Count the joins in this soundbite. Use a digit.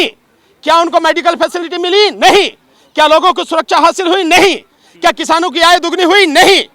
0